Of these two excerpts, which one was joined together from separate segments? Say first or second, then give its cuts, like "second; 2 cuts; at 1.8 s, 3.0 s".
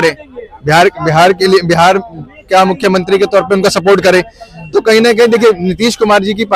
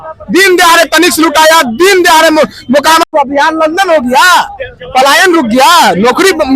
second; 1 cut; at 3.1 s